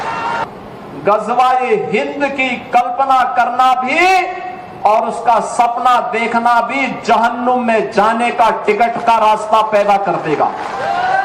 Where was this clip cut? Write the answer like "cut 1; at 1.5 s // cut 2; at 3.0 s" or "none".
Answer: none